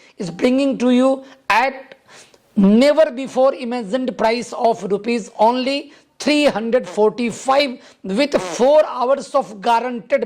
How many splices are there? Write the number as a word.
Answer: zero